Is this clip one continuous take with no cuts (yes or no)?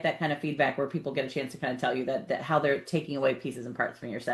yes